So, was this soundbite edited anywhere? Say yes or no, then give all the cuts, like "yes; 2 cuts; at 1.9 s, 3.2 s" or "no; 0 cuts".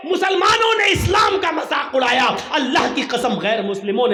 no; 0 cuts